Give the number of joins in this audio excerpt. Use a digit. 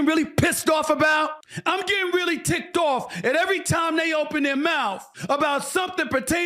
2